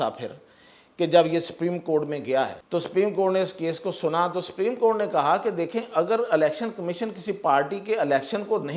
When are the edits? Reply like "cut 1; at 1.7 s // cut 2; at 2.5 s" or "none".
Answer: cut 1; at 2.6 s